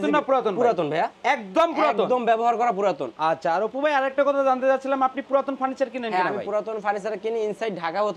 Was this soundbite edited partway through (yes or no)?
no